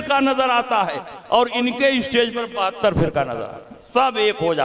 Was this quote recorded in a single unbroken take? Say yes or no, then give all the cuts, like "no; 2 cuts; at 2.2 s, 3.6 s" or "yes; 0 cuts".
yes; 0 cuts